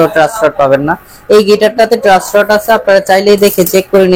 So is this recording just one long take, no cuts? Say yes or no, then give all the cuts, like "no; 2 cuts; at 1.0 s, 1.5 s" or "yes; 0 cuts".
yes; 0 cuts